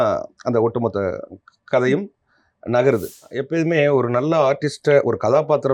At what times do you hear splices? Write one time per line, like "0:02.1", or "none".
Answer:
0:03.4